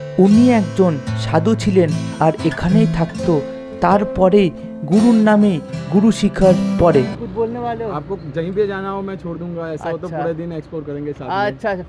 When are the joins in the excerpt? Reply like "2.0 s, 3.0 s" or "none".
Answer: 7.2 s

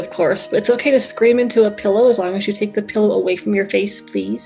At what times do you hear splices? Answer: none

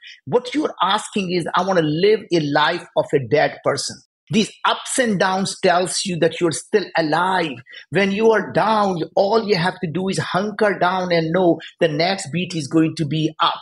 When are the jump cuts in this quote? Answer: 4.1 s

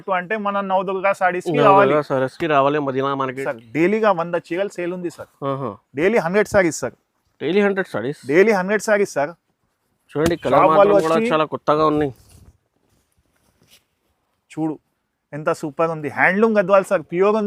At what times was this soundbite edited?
3.4 s

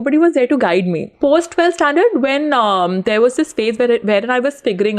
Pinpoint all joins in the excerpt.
1.1 s

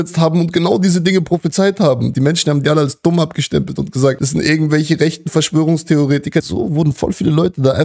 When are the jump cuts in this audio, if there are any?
2.1 s, 4.2 s, 6.4 s

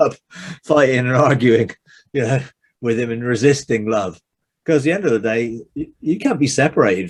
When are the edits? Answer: none

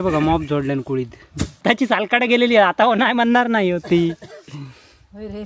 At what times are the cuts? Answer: 1.6 s

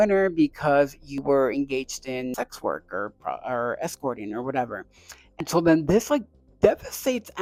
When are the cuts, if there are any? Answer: none

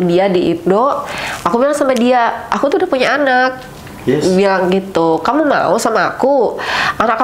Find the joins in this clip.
none

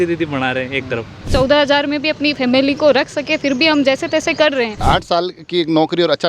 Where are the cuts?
1.3 s, 4.8 s

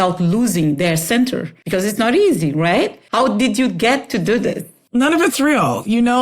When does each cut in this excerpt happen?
1.5 s, 2.9 s, 4.7 s

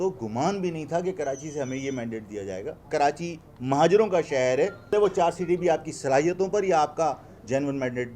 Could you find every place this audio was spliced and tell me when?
2.8 s, 4.9 s

